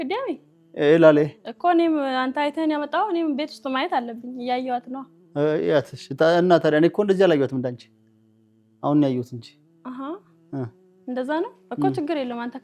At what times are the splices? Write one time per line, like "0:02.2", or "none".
none